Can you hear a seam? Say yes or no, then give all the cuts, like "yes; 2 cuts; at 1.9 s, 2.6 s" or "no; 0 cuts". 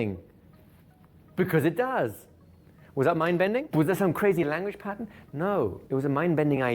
yes; 2 cuts; at 3.7 s, 5.8 s